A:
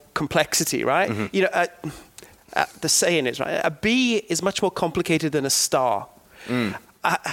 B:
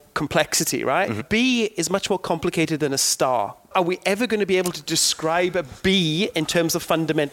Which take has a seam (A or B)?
B